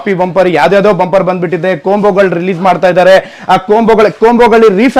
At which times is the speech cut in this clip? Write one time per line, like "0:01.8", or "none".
none